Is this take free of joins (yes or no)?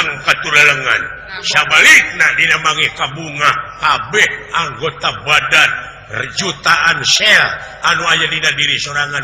no